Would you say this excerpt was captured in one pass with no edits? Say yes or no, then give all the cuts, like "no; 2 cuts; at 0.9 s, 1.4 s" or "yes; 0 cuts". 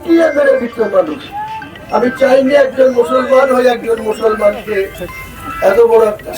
yes; 0 cuts